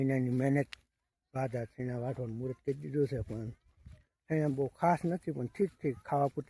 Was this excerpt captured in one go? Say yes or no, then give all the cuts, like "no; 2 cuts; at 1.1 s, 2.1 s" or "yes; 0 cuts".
yes; 0 cuts